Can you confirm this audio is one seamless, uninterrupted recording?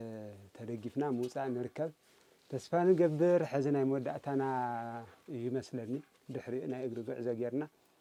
yes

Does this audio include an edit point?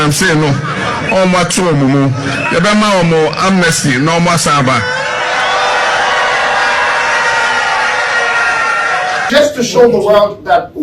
yes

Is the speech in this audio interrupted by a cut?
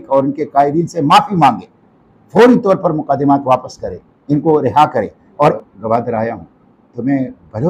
yes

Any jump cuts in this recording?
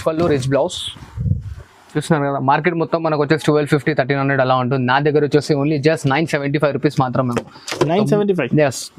no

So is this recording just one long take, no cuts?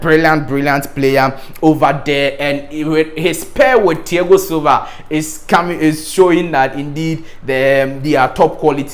yes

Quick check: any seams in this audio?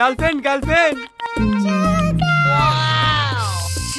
no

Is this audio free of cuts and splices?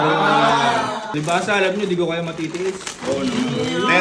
no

